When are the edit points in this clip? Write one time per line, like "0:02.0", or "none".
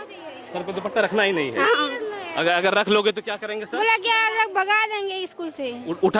none